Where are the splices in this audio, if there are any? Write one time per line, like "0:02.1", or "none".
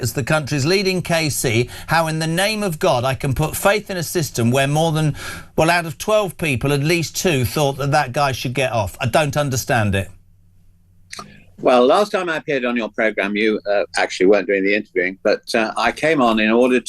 0:13.3